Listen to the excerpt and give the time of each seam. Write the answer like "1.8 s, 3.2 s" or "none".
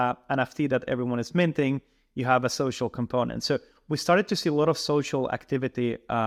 none